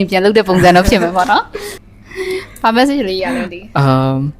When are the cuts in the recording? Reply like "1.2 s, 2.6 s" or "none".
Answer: none